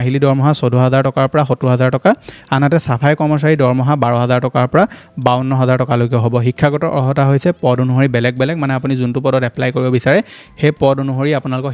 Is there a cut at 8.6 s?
no; 0 cuts

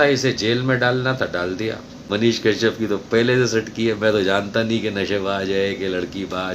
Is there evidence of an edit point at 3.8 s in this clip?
no; 1 cut; at 1.9 s

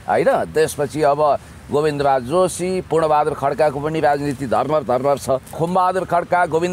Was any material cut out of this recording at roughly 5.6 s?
yes; 1 cut; at 5.6 s

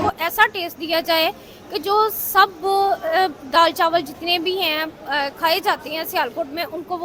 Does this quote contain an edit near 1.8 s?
no; 0 cuts

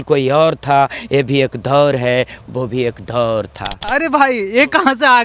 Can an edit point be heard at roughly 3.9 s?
yes; 1 cut; at 3.9 s

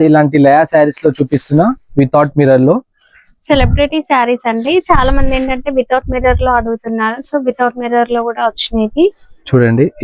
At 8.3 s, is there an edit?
no; 0 cuts

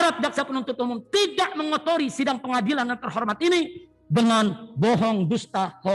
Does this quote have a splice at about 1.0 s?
no; 0 cuts

